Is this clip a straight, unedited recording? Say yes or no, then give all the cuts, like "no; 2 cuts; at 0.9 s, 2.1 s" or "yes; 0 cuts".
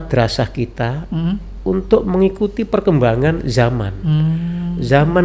yes; 0 cuts